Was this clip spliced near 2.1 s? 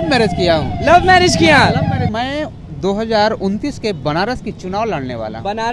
yes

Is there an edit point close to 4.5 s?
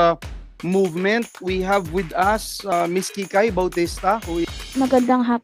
yes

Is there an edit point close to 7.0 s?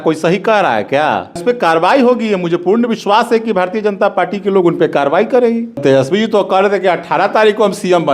no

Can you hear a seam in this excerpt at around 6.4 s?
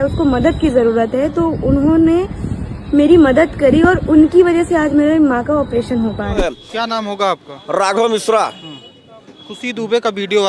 yes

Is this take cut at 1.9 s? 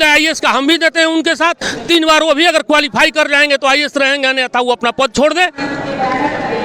no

